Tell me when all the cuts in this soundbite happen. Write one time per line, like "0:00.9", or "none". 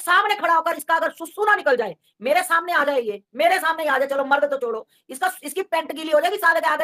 none